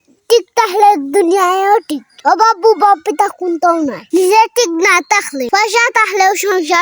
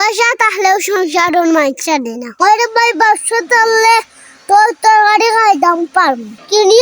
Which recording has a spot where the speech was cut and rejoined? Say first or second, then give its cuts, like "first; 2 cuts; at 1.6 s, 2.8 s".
second; 1 cut; at 2.3 s